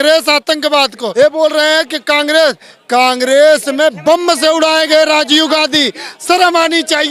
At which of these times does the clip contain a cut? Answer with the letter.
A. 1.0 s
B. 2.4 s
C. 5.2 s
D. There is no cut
A